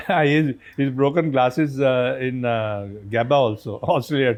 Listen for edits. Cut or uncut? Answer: uncut